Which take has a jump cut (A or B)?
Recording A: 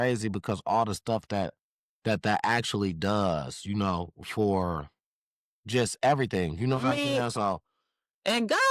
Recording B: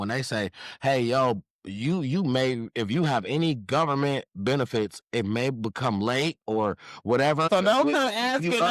B